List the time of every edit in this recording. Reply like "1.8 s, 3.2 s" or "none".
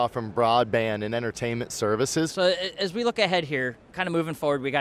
2.3 s, 3.9 s